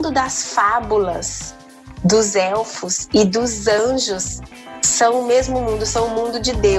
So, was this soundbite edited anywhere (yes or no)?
no